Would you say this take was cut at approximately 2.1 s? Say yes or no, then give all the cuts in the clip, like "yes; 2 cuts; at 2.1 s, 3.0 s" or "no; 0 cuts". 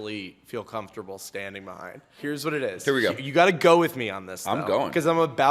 yes; 1 cut; at 2.1 s